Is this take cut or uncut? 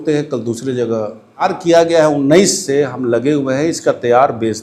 cut